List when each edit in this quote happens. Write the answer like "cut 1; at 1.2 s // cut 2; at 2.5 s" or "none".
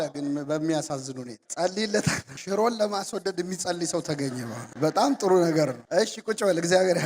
none